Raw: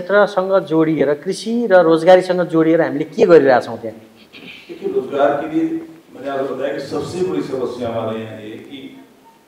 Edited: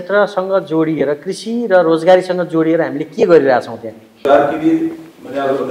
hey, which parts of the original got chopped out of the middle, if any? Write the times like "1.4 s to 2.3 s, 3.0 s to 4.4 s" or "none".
4.2 s to 5.1 s